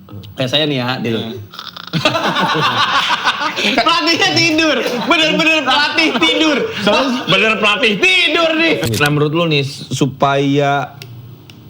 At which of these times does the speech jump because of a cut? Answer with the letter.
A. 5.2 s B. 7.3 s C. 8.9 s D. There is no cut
C